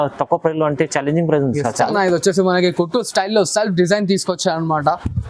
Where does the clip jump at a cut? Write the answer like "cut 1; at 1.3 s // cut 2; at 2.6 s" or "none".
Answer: cut 1; at 1.9 s